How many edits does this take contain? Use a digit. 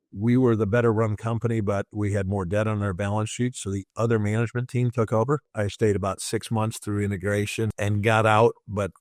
2